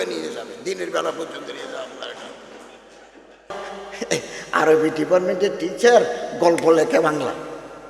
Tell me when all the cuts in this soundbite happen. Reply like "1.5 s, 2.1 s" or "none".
3.5 s